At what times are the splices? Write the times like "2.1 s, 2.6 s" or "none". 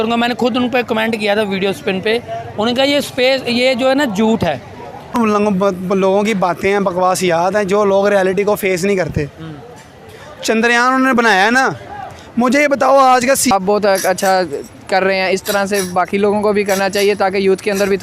5.1 s, 13.5 s